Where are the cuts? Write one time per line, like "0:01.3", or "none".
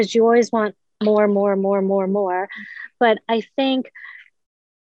none

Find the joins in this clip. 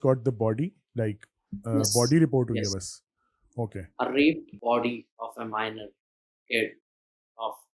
0:04.5

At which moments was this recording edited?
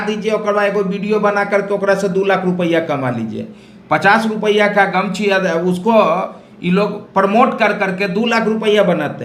none

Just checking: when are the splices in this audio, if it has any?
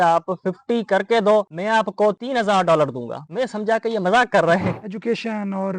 0:04.9

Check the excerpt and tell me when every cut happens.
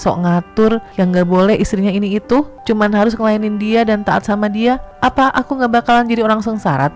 0:00.9
0:02.6
0:04.9

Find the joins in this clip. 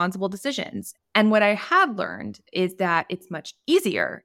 0:00.9

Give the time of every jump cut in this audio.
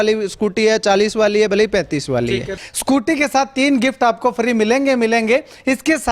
0:02.6

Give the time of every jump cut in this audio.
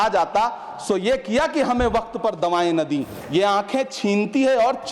0:03.2

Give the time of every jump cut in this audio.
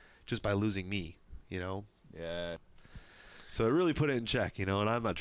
0:02.6

